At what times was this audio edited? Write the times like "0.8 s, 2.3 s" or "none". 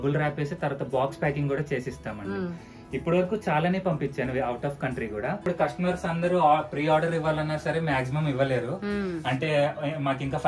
5.4 s